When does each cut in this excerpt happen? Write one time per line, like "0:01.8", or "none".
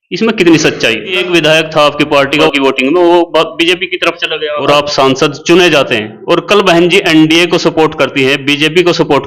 0:01.2
0:02.5
0:04.6

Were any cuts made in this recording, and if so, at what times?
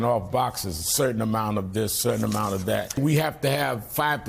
0:03.0

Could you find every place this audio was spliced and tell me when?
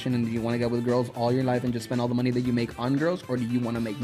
none

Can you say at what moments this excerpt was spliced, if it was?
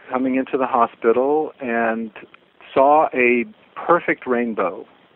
none

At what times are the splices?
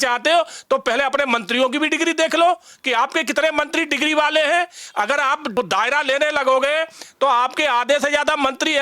0:05.6

